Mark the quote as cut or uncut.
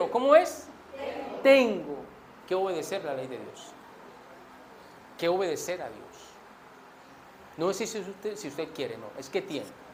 uncut